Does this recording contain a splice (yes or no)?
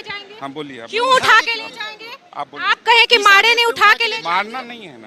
no